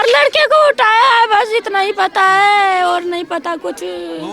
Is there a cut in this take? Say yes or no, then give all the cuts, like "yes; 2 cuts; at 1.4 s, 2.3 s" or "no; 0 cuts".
no; 0 cuts